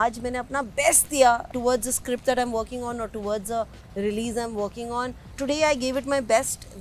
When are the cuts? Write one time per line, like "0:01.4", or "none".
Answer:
0:01.5
0:05.3